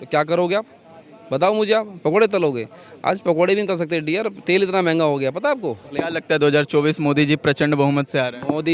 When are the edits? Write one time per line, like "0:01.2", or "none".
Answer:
0:06.0